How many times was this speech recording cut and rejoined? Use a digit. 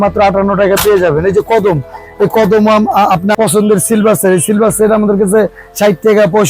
1